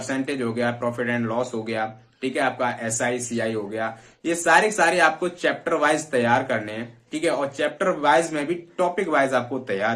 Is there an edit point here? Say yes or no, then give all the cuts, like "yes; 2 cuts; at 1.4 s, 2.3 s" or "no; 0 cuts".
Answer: no; 0 cuts